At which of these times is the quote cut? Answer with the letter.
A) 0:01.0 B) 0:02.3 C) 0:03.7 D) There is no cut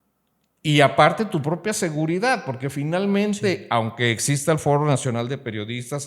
D